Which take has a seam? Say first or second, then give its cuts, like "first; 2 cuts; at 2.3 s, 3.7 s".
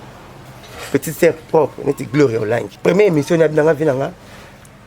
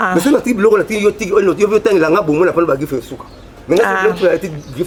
first; 1 cut; at 2.7 s